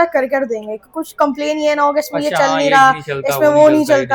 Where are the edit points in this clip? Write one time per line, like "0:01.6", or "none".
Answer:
none